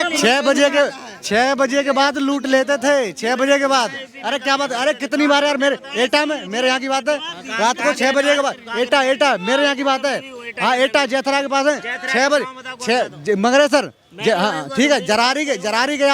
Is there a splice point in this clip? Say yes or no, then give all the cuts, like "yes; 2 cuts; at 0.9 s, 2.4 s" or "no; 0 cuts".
no; 0 cuts